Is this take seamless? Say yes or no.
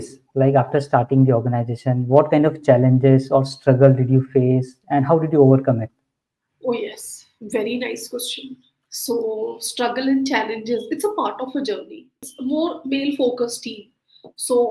no